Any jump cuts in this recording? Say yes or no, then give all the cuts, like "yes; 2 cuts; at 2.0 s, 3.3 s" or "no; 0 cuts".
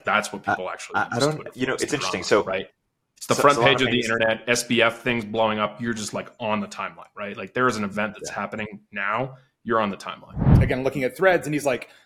yes; 1 cut; at 10.5 s